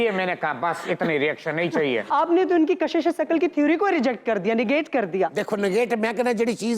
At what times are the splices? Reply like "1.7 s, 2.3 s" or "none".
2.0 s